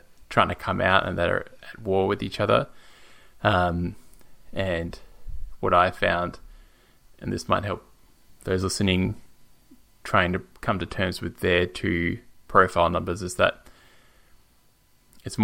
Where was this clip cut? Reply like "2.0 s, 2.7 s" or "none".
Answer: none